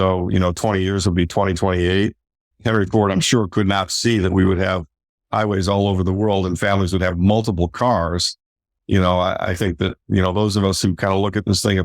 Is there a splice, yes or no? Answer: yes